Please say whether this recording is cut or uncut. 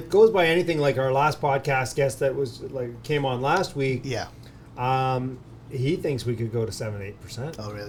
uncut